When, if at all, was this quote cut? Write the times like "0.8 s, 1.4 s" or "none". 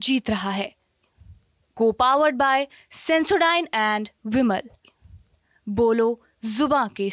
none